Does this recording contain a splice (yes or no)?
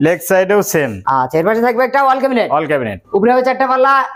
yes